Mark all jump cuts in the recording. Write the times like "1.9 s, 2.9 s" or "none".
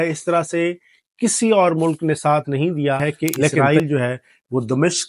3.6 s